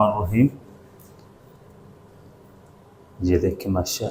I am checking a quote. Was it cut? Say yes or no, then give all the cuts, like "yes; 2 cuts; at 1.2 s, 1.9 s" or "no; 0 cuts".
no; 0 cuts